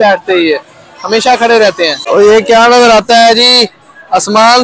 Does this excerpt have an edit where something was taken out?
yes; 1 cut; at 2.0 s

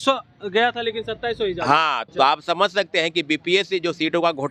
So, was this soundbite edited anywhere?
yes; 1 cut; at 2.0 s

